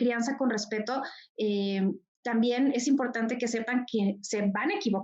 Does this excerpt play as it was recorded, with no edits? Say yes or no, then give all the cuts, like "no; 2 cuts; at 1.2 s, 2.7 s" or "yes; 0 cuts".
yes; 0 cuts